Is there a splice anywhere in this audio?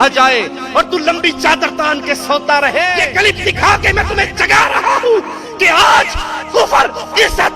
yes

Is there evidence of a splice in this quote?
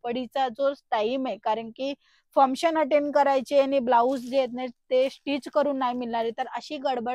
no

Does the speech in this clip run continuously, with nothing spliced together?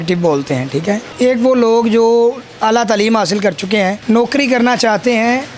no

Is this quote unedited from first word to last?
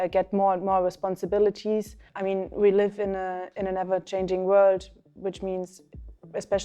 no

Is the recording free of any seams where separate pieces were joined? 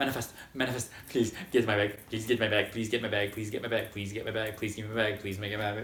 yes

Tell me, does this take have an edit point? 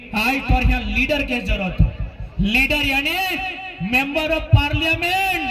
no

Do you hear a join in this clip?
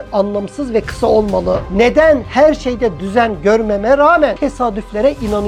yes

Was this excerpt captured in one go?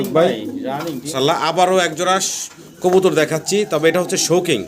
no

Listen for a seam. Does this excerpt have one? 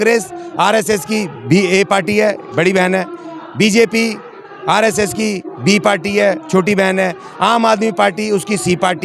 no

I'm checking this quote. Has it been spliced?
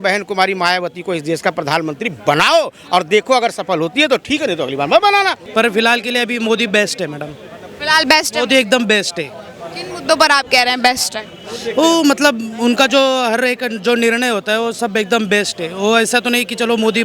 yes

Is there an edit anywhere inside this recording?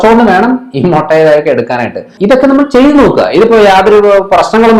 yes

